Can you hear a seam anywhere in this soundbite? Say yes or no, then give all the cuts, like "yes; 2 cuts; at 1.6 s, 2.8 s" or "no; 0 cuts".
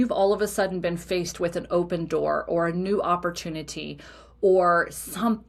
no; 0 cuts